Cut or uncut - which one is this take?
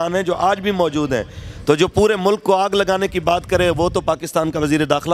uncut